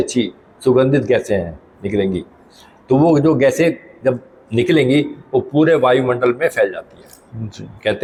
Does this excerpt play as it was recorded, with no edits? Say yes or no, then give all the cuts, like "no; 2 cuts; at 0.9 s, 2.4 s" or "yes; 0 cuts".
yes; 0 cuts